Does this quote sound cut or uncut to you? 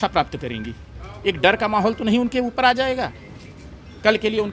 uncut